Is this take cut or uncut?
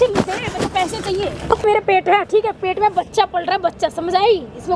cut